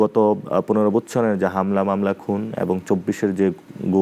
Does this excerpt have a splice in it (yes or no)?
no